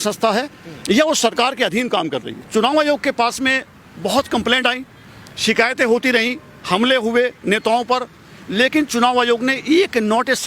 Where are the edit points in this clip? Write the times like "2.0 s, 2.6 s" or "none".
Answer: 2.3 s